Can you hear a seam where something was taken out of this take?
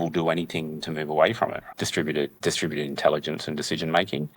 yes; 1 cut; at 1.6 s

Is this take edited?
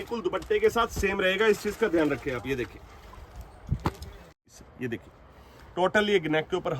yes; 1 cut; at 4.5 s

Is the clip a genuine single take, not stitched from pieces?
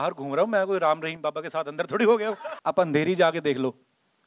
no; 1 cut; at 2.5 s

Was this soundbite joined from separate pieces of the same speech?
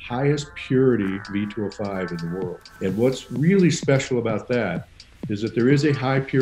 yes; 1 cut; at 2.6 s

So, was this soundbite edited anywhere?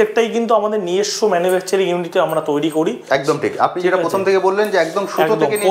no; 0 cuts

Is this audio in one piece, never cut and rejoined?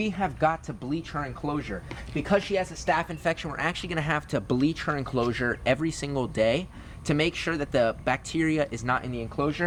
yes; 0 cuts

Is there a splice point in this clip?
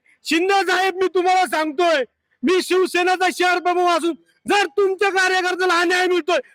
no; 0 cuts

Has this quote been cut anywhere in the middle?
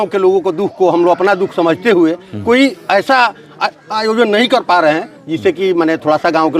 no; 0 cuts

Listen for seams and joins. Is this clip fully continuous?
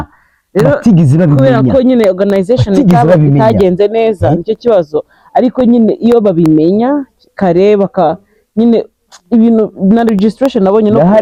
yes; 0 cuts

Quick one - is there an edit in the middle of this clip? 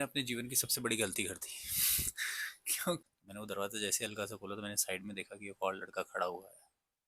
yes; 1 cut; at 3.0 s

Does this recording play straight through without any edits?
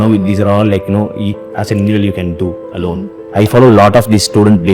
no; 1 cut; at 3.1 s

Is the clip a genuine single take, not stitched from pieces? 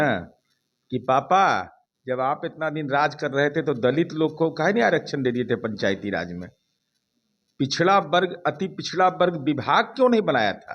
yes; 0 cuts

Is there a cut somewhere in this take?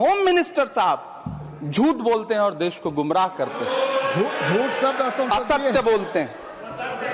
no; 0 cuts

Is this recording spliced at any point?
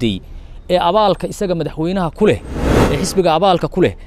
yes; 1 cut; at 2.7 s

